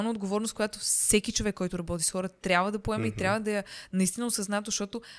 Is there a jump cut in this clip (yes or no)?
no